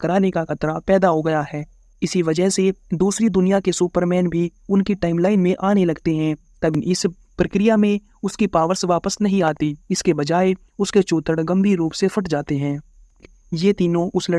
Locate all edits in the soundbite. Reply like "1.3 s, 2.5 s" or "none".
6.8 s, 13.2 s